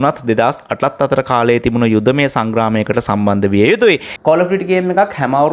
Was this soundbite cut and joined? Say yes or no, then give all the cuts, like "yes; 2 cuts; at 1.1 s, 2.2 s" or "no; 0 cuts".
yes; 1 cut; at 4.2 s